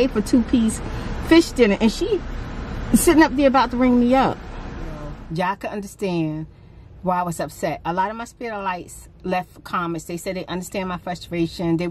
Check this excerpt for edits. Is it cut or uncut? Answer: cut